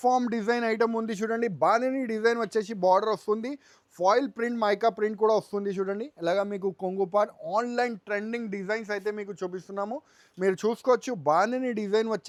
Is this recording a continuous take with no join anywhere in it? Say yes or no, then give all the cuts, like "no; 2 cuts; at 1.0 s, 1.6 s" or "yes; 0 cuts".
yes; 0 cuts